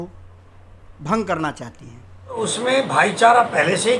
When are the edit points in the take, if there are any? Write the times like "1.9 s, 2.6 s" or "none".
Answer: 2.4 s

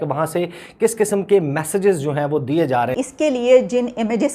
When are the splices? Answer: 2.9 s

